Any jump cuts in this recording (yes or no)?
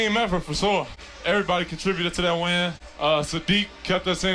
yes